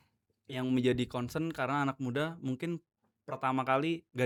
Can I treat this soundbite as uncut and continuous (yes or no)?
yes